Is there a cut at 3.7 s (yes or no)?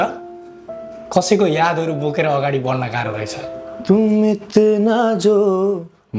yes